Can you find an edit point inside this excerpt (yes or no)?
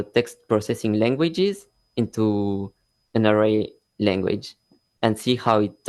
no